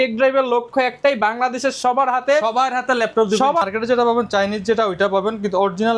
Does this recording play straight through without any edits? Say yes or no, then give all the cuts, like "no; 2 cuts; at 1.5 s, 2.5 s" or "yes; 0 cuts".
no; 1 cut; at 3.6 s